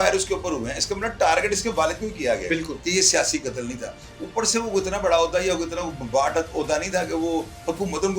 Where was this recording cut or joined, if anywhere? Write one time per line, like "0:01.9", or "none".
0:02.8

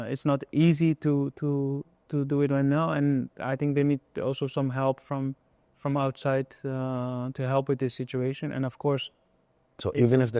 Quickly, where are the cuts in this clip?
none

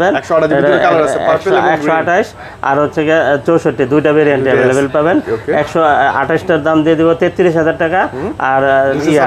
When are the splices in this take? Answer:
none

